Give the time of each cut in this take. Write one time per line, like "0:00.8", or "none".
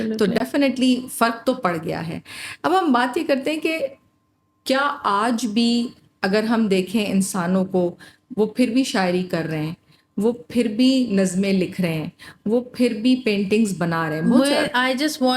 0:14.2